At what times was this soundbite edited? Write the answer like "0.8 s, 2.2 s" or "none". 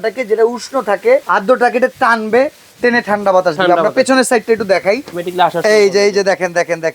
1.3 s, 5.1 s